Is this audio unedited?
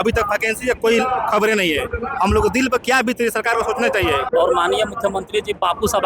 no; 1 cut; at 4.2 s

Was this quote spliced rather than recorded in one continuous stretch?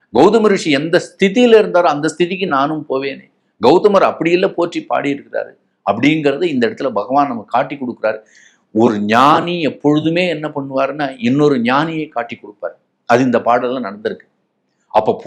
no; 0 cuts

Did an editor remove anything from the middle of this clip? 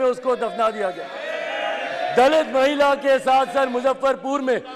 no; 0 cuts

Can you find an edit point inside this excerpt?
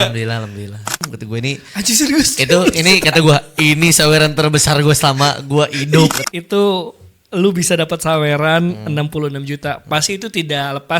yes; 2 cuts; at 0.9 s, 6.2 s

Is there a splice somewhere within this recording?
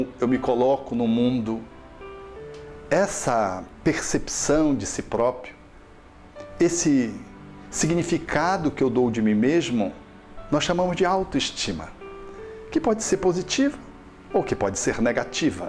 yes; 1 cut; at 11.3 s

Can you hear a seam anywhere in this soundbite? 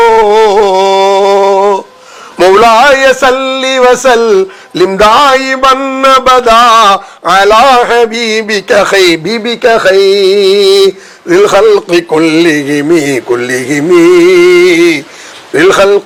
no; 0 cuts

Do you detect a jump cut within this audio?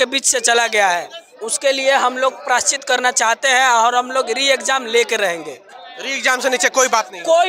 no; 0 cuts

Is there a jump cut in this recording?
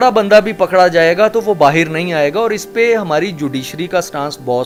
no; 0 cuts

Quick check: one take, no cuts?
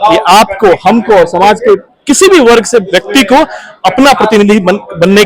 no; 1 cut; at 1.9 s

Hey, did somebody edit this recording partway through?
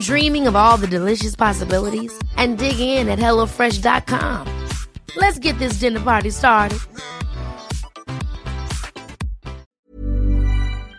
yes; 1 cut; at 9.7 s

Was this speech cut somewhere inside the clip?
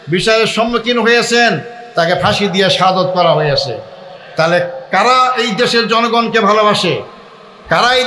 no; 0 cuts

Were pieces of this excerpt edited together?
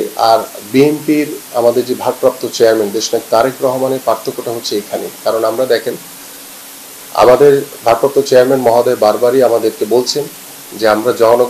no; 0 cuts

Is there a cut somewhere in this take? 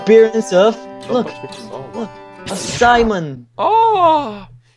no; 0 cuts

